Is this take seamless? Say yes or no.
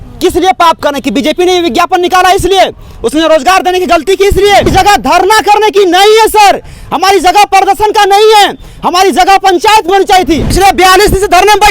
no